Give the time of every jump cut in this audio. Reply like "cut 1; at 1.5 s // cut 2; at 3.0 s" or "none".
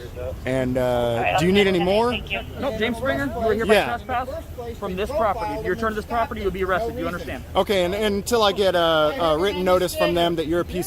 none

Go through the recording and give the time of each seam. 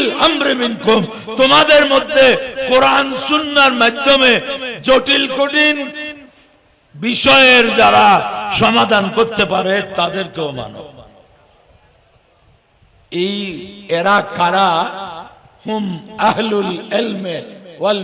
none

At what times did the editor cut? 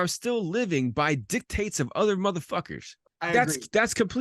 cut 1; at 3.1 s

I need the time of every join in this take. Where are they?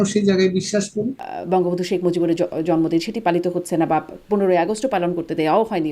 cut 1; at 1.3 s

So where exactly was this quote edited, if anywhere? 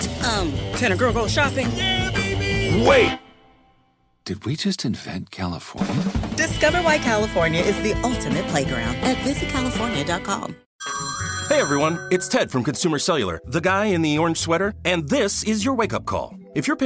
cut 1; at 10.6 s

